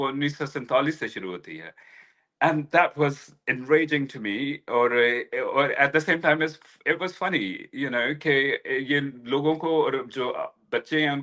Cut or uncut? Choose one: uncut